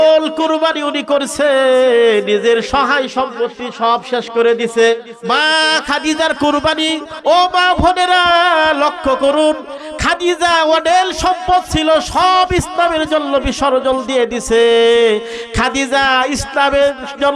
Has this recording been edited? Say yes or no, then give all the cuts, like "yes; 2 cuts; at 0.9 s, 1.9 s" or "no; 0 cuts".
yes; 1 cut; at 5.1 s